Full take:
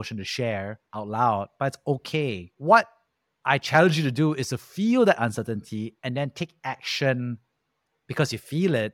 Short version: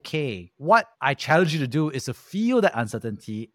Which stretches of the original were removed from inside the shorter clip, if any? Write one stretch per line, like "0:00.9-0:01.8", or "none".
0:02.9-0:03.4